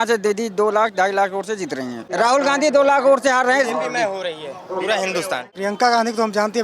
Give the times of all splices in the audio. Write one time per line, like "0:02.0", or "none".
0:02.0
0:05.5